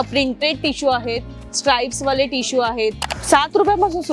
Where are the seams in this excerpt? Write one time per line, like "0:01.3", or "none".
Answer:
0:01.3
0:03.0